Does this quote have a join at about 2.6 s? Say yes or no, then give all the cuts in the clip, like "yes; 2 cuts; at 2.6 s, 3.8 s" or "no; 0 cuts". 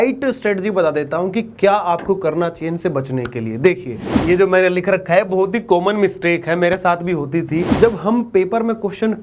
no; 2 cuts; at 4.2 s, 7.7 s